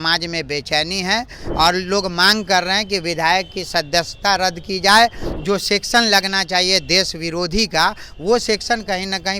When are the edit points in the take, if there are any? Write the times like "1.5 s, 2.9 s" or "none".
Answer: 1.4 s, 5.2 s